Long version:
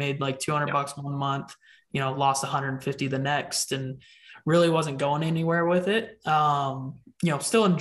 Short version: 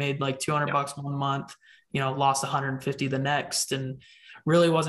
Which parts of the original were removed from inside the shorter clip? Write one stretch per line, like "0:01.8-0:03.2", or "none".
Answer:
none